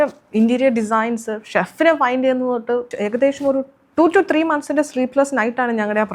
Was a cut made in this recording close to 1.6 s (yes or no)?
no